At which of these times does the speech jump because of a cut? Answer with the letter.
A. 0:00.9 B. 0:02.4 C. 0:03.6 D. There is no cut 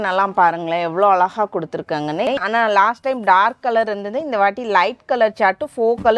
B